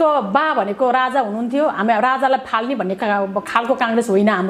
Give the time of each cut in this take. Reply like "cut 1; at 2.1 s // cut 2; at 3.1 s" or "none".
none